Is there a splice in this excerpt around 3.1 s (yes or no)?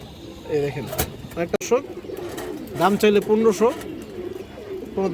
no